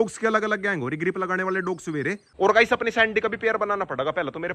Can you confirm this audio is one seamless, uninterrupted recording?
no; 1 cut; at 2.3 s

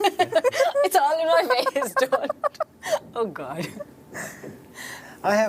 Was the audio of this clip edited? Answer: no; 0 cuts

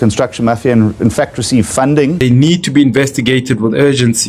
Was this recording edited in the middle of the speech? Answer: yes; 1 cut; at 2.2 s

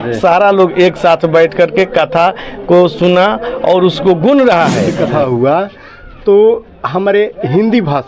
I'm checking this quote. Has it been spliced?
yes; 1 cut; at 5.0 s

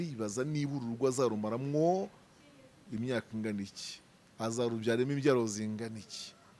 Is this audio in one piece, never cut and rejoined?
yes; 0 cuts

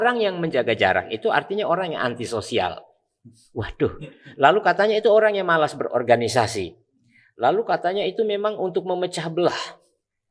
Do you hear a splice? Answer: no; 0 cuts

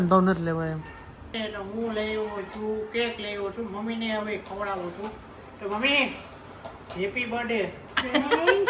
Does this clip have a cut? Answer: yes; 1 cut; at 1.3 s

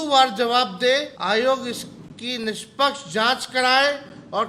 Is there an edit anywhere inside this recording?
yes; 1 cut; at 1.1 s

